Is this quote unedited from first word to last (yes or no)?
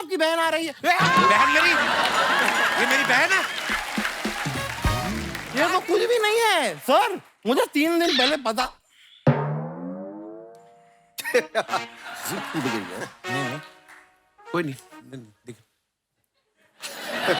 no